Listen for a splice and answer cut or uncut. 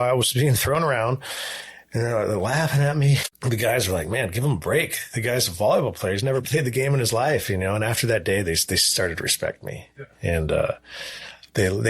cut